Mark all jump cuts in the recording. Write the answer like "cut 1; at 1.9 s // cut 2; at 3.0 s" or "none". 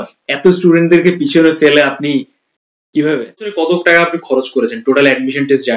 cut 1; at 3.6 s